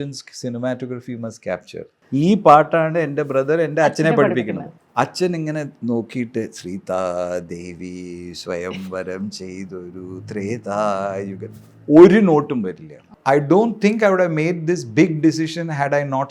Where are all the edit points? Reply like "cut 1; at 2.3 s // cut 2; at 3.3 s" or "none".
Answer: cut 1; at 2.0 s // cut 2; at 4.7 s // cut 3; at 13.1 s